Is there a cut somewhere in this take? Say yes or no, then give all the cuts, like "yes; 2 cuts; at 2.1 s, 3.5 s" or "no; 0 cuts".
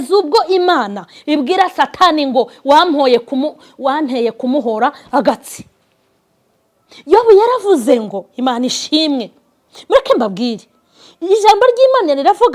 no; 0 cuts